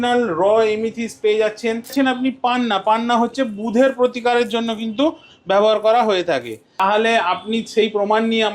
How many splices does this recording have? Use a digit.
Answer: 2